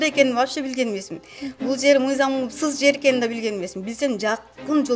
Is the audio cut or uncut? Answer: uncut